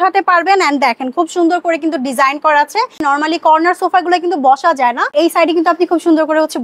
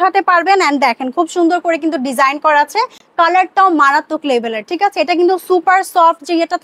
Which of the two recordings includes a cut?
first; 1 cut; at 3.0 s

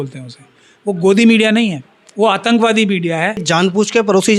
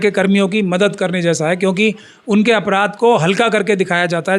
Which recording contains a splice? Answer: first; 1 cut; at 3.5 s

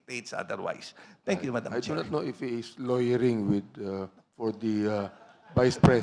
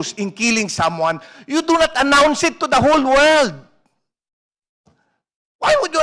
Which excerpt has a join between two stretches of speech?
first; 1 cut; at 1.7 s

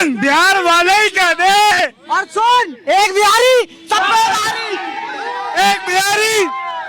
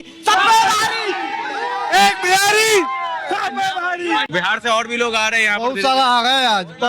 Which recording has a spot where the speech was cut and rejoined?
second; 1 cut; at 4.3 s

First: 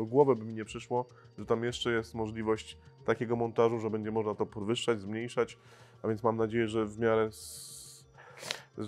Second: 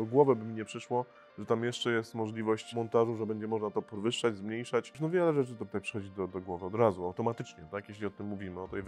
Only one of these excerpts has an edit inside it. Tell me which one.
second; 2 cuts; at 2.7 s, 5.1 s

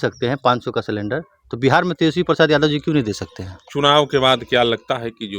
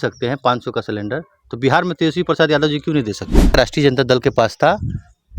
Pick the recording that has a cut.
second; 1 cut; at 3.5 s

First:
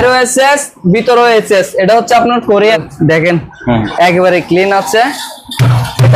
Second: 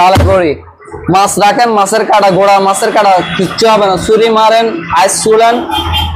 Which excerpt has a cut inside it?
first; 1 cut; at 2.9 s

